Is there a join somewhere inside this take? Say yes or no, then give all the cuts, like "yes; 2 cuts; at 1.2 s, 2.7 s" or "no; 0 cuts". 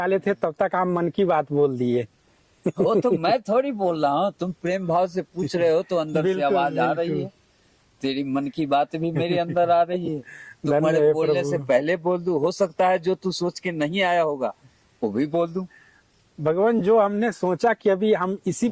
no; 0 cuts